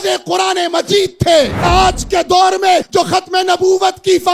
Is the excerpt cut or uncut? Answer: cut